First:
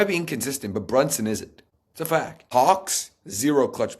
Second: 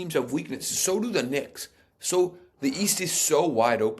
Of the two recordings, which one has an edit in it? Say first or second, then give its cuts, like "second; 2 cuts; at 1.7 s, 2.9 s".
first; 1 cut; at 2.1 s